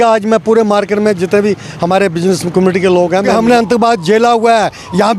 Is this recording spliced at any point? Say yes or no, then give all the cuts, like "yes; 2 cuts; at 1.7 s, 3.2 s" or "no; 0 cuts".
yes; 1 cut; at 3.3 s